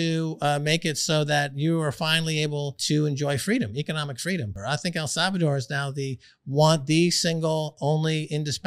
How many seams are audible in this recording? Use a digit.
2